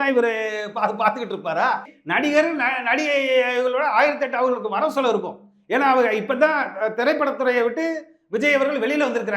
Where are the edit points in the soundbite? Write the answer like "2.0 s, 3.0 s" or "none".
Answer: 1.9 s